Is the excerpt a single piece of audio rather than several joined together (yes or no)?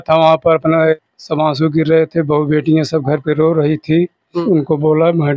no